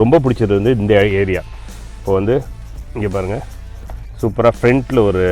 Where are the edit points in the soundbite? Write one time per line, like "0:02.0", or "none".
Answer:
none